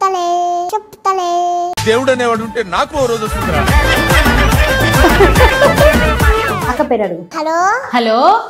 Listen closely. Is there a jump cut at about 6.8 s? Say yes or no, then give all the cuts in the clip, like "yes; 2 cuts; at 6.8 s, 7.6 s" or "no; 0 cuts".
no; 0 cuts